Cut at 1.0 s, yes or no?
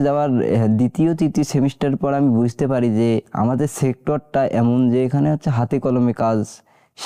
no